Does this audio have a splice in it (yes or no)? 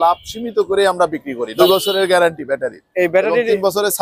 yes